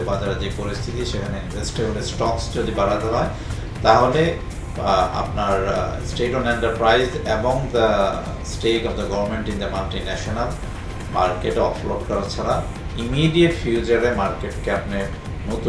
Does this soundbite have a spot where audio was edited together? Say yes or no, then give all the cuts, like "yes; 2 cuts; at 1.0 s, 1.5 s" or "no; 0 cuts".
no; 0 cuts